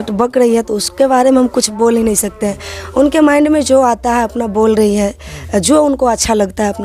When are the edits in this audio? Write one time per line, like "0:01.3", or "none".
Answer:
none